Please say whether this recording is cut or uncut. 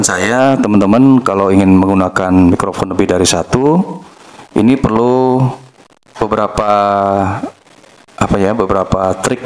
uncut